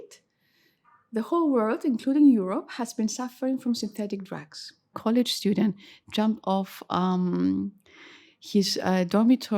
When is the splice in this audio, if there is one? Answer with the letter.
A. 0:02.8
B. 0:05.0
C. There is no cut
B